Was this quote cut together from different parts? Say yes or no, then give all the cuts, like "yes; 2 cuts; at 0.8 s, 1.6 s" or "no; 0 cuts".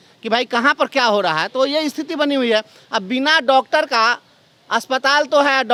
no; 0 cuts